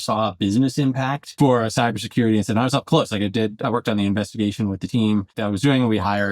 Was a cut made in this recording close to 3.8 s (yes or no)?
no